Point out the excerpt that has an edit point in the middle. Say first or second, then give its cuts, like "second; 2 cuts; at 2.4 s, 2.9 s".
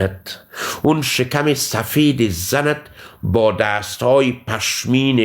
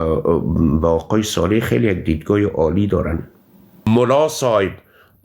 second; 1 cut; at 3.9 s